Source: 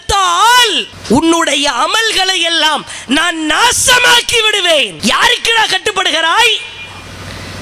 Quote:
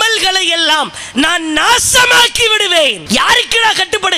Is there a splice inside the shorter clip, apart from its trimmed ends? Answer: no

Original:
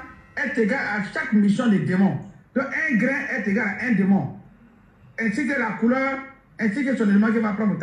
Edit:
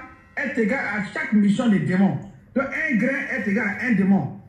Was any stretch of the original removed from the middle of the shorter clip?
no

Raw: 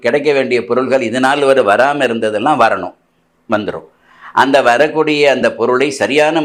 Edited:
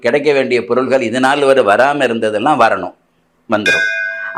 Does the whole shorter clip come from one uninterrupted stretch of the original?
yes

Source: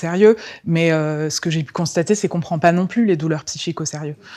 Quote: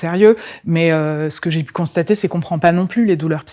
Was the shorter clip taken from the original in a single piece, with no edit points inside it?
yes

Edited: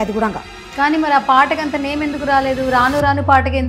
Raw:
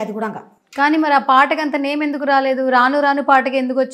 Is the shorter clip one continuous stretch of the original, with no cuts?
yes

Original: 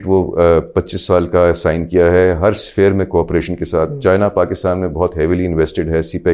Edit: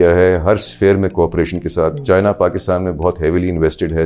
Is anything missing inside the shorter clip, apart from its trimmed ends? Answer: no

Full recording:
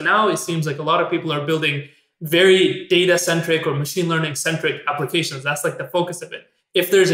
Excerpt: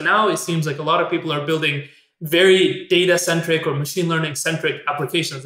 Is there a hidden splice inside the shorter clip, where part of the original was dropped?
no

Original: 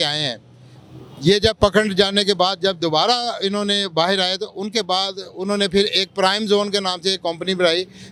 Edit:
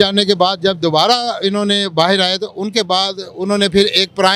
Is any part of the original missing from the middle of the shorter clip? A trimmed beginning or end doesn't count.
no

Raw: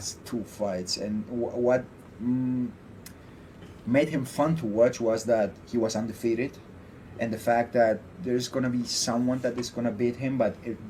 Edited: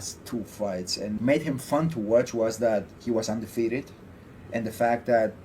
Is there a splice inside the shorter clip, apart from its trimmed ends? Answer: yes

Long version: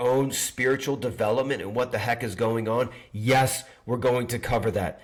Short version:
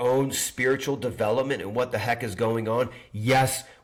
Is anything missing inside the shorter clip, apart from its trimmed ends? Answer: no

